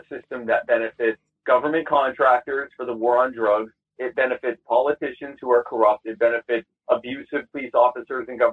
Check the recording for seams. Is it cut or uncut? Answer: cut